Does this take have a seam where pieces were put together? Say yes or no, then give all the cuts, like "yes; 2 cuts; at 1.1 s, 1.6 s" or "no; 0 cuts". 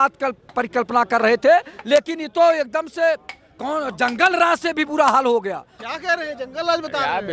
no; 0 cuts